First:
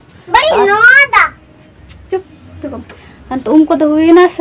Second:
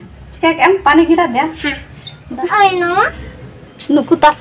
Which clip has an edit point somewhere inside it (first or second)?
second